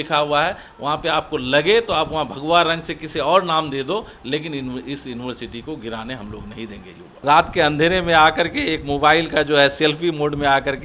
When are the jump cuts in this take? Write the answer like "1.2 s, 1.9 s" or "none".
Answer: 7.1 s